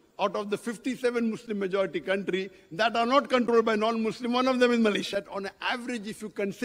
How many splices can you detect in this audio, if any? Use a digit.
1